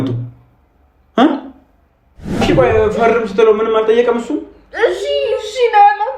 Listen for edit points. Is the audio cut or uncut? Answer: cut